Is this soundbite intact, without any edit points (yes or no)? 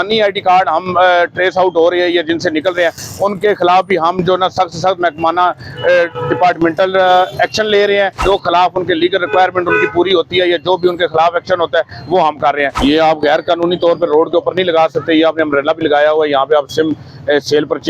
no